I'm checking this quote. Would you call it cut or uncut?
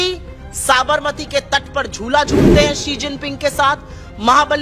uncut